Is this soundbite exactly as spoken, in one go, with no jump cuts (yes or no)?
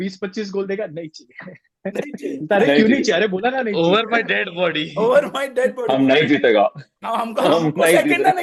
yes